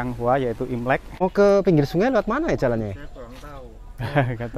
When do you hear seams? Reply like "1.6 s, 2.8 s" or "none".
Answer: 1.2 s